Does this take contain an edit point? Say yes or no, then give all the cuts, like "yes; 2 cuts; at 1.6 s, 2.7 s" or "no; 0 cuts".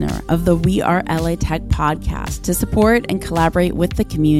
no; 0 cuts